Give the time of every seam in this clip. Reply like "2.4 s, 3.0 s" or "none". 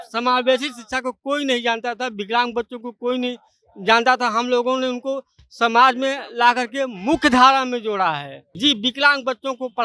8.4 s

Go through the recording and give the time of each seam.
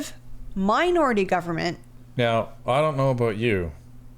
1.8 s

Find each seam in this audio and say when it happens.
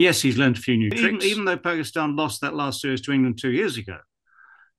1.0 s

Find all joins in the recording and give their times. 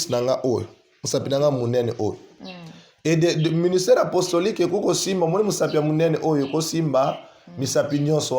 none

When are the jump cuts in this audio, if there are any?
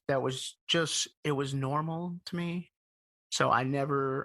2.7 s

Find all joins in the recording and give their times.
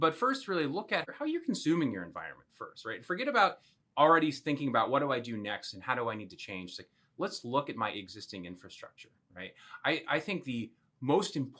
1.1 s

